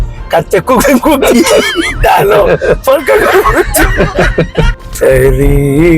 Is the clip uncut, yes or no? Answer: no